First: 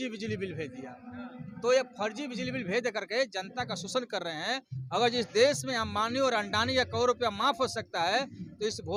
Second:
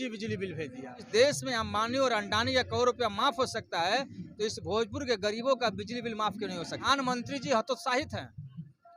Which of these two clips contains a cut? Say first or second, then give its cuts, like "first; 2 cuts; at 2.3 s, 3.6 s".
second; 2 cuts; at 1.1 s, 6.8 s